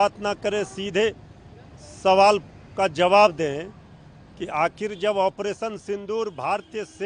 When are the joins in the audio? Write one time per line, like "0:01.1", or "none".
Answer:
none